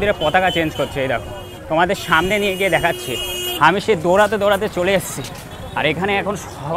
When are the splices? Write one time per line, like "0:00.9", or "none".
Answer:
none